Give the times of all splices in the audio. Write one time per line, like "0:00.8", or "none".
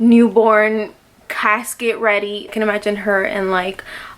0:02.5